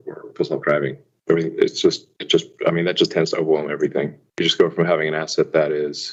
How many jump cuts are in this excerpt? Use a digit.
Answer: 0